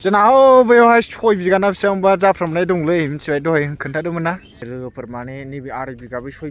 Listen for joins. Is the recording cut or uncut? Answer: cut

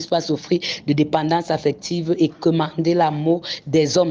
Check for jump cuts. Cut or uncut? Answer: uncut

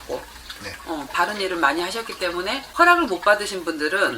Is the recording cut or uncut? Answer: cut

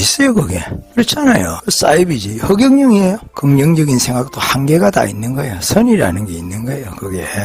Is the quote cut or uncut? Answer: cut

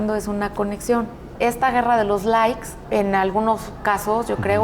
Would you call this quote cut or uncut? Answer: cut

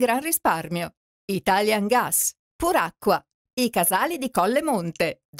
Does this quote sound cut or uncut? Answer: cut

